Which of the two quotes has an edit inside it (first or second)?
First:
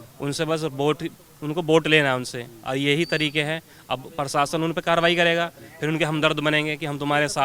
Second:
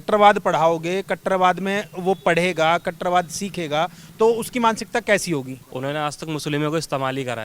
second